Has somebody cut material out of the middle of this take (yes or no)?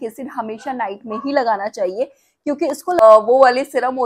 yes